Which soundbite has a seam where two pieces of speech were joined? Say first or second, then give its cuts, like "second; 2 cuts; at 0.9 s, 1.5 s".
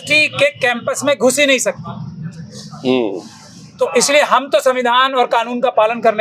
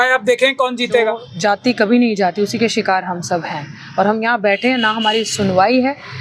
second; 1 cut; at 1.3 s